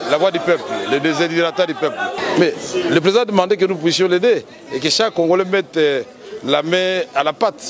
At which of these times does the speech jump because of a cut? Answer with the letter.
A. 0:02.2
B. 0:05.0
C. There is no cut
A